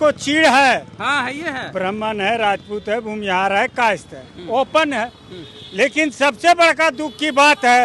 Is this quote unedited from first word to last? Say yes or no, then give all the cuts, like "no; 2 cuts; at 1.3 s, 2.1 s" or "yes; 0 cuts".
yes; 0 cuts